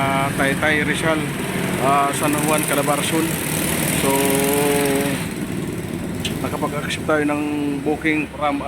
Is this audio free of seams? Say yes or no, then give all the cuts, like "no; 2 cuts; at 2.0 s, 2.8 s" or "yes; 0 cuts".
yes; 0 cuts